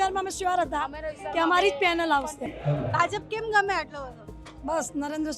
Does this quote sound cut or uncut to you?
cut